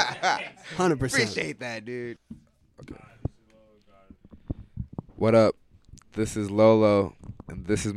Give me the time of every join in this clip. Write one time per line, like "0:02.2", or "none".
0:02.2

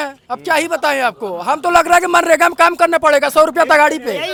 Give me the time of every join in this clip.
none

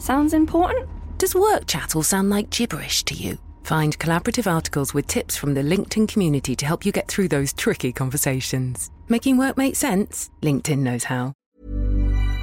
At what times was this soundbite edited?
0:11.4

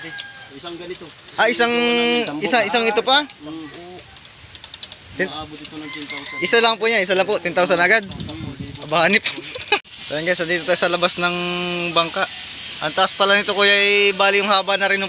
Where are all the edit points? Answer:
0:09.9

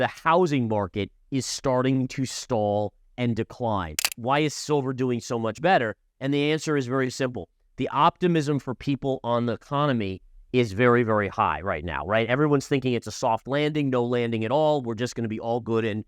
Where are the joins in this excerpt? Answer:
0:04.1

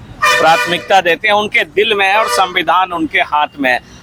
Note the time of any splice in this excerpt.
none

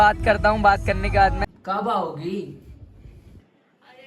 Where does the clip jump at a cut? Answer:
0:01.4

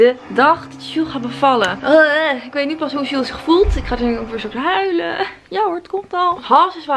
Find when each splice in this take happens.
none

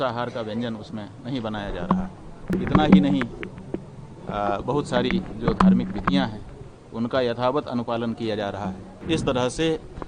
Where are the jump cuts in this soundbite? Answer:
0:02.5
0:08.9

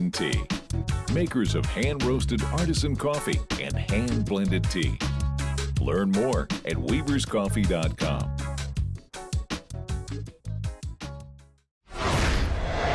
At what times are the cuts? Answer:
0:11.8

